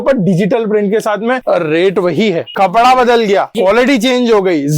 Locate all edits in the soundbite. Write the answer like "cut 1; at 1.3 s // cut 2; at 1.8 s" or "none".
cut 1; at 1.4 s // cut 2; at 2.5 s // cut 3; at 3.5 s

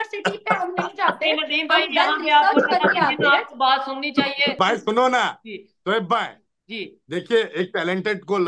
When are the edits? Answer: cut 1; at 4.6 s

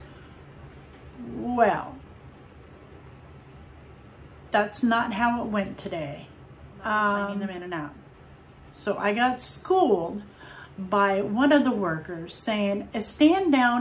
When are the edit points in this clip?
cut 1; at 7.5 s

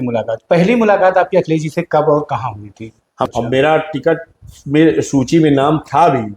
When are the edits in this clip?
cut 1; at 3.1 s

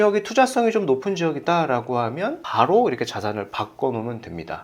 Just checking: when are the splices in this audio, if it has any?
none

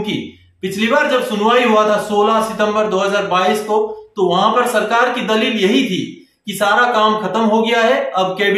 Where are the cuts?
none

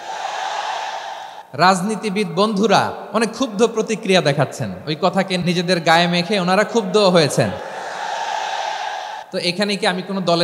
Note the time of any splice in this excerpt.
cut 1; at 1.4 s // cut 2; at 3.0 s // cut 3; at 5.4 s // cut 4; at 9.2 s

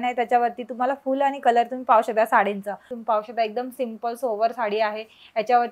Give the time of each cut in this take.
cut 1; at 2.9 s

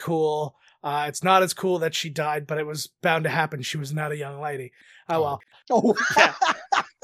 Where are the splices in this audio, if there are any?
cut 1; at 5.2 s

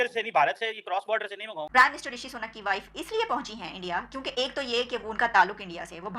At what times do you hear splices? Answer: cut 1; at 1.6 s

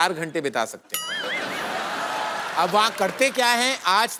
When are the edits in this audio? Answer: none

